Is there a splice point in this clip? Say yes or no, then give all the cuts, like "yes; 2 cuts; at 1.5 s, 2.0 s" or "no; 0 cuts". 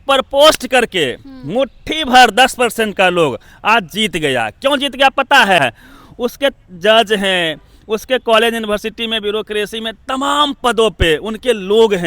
yes; 1 cut; at 5.6 s